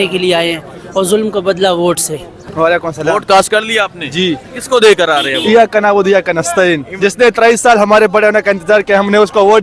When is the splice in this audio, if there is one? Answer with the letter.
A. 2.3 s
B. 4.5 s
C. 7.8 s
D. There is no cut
A